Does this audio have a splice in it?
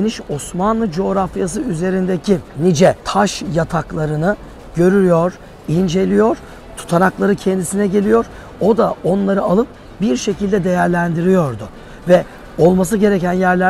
no; 0 cuts

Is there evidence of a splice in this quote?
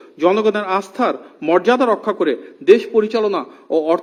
no; 0 cuts

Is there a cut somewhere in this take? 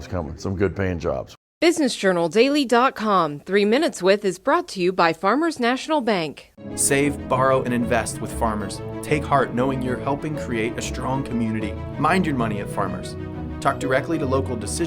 yes; 1 cut; at 1.3 s

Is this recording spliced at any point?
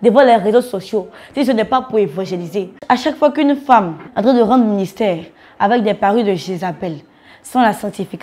yes; 2 cuts; at 2.8 s, 4.0 s

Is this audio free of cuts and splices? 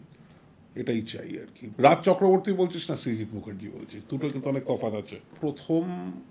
no; 2 cuts; at 1.7 s, 5.3 s

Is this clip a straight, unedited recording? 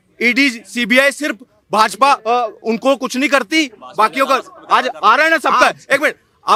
yes; 0 cuts

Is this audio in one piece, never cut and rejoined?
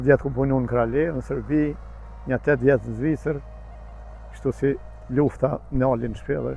yes; 0 cuts

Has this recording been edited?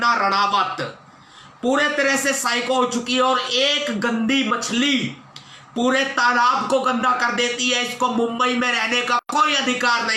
no; 0 cuts

